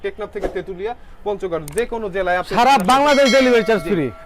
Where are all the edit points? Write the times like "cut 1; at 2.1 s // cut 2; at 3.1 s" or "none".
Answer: none